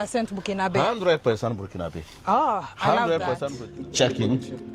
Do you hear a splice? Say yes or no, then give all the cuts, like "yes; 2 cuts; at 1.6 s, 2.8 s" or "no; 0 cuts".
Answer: yes; 1 cut; at 3.6 s